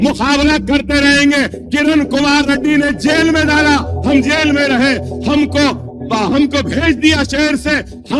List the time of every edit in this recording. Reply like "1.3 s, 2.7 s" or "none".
none